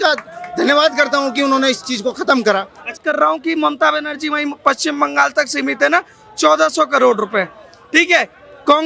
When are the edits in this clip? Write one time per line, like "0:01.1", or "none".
0:03.0